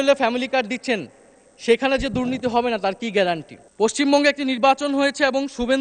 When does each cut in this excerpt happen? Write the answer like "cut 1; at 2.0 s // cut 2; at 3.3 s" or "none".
cut 1; at 3.7 s